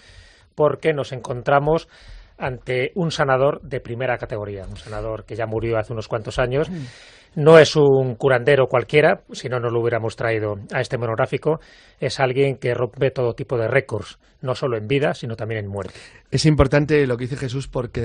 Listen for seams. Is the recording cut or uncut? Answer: uncut